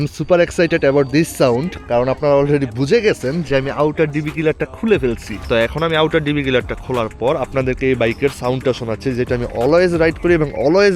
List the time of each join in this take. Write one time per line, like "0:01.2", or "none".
0:05.3

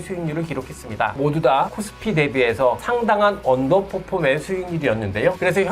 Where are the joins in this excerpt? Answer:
0:01.7
0:02.8

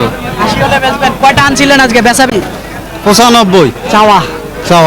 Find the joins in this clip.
0:02.3

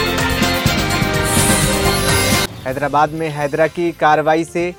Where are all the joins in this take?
none

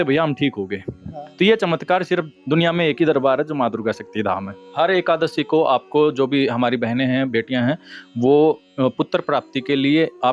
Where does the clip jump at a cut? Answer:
0:04.6

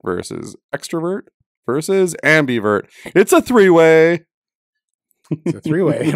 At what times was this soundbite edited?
none

